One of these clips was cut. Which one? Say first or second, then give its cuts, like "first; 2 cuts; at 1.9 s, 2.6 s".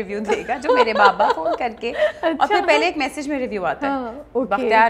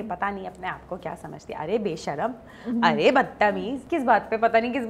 second; 1 cut; at 3.8 s